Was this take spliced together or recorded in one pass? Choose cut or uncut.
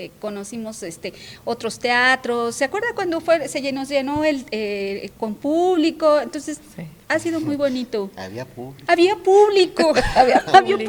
uncut